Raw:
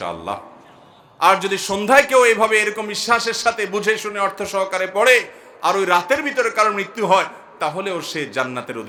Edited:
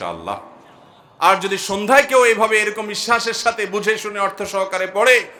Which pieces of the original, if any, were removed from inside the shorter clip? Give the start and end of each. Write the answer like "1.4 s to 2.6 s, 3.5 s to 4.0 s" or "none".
none